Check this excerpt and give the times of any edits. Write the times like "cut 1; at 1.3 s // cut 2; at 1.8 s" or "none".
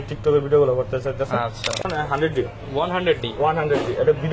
cut 1; at 1.8 s